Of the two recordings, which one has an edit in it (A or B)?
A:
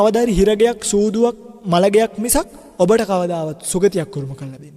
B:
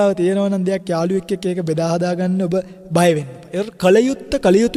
A